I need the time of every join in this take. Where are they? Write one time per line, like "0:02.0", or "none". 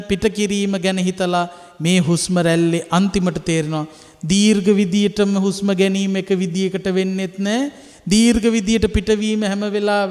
none